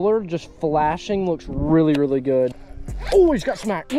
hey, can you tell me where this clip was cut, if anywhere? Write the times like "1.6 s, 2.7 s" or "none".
2.6 s